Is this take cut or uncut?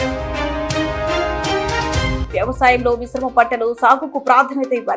cut